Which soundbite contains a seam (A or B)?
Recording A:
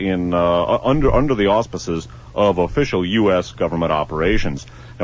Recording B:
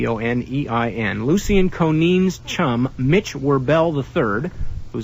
A